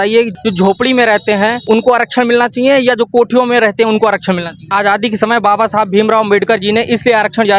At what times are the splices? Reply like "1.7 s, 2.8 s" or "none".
1.6 s, 4.7 s